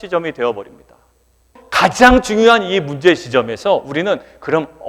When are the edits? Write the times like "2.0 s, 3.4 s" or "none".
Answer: 1.6 s

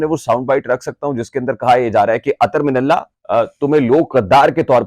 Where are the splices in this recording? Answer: 3.2 s

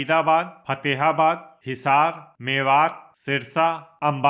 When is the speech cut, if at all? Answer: 1.6 s, 2.3 s, 3.5 s

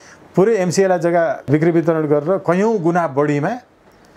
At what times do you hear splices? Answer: 1.5 s

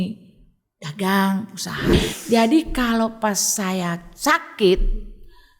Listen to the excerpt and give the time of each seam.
1.9 s

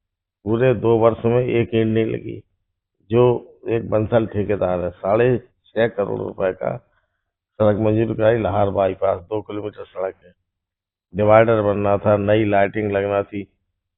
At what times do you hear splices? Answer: none

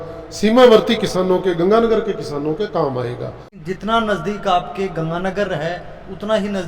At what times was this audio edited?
3.6 s

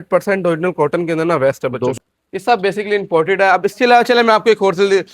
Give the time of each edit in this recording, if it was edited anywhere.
2.0 s

